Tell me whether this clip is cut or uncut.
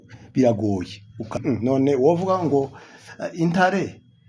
cut